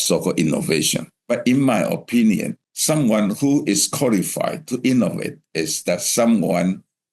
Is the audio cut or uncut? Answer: cut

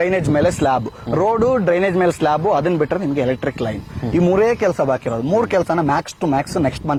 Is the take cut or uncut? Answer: uncut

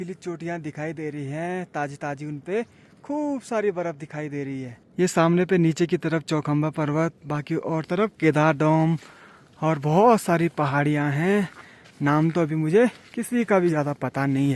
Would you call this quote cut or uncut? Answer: uncut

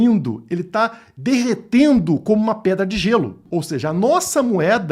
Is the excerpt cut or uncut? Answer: cut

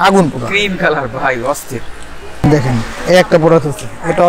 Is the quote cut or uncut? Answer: cut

